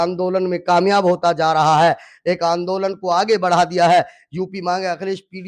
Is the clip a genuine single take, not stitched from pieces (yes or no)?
yes